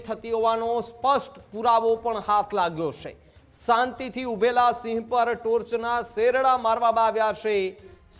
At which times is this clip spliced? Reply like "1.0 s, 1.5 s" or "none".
none